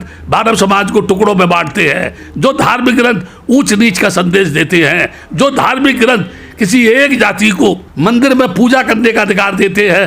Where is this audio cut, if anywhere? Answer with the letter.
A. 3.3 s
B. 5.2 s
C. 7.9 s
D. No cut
C